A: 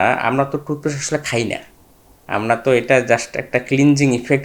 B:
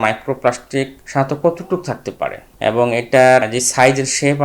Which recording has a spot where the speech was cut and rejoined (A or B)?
B